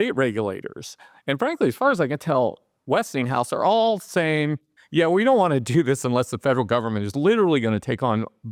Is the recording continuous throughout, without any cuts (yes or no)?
yes